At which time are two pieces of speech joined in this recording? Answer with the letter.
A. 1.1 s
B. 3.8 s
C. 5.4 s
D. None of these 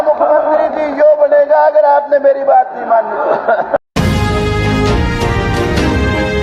B